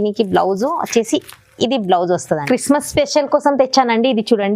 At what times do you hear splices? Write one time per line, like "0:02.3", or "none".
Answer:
0:02.4